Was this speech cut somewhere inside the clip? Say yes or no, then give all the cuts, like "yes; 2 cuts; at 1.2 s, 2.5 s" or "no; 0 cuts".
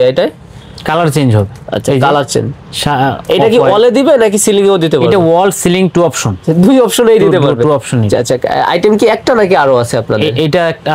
no; 0 cuts